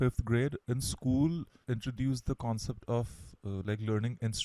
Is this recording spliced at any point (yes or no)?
yes